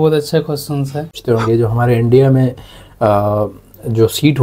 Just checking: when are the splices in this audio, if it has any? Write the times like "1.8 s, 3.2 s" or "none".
1.2 s